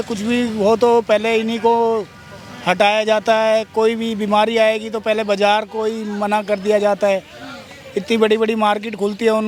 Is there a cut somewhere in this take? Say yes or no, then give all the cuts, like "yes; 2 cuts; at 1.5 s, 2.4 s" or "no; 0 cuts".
no; 0 cuts